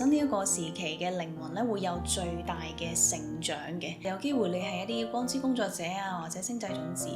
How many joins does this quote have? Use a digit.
1